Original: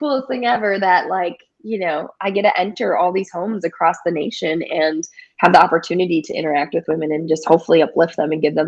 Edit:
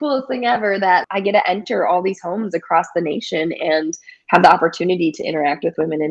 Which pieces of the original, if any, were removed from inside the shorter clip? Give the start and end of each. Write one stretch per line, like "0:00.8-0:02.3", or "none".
0:01.1-0:02.2